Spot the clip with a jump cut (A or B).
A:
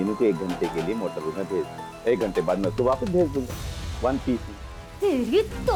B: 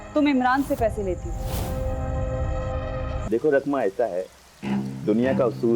B